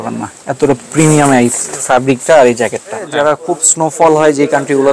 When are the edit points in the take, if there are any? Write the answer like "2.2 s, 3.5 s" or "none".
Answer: 3.1 s